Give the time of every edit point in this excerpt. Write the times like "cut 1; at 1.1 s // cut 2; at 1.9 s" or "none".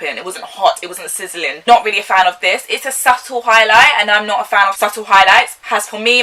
none